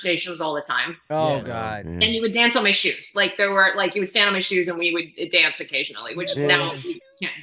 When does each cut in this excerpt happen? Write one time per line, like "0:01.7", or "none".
none

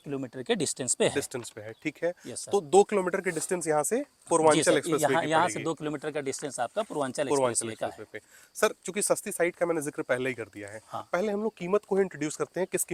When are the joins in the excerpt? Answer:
none

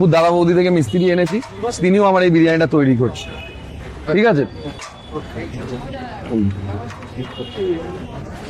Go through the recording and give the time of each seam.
none

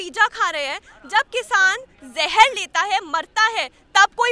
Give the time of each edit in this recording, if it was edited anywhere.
none

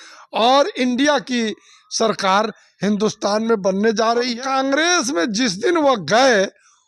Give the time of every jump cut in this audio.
0:04.3

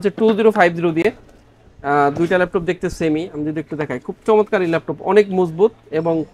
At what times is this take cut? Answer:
none

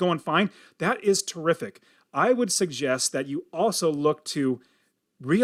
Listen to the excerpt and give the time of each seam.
none

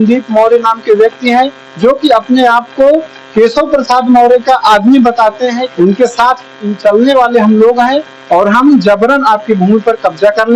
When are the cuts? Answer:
0:05.7

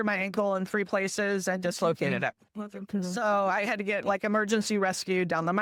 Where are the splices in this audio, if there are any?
none

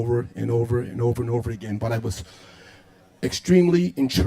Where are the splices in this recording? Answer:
0:00.9

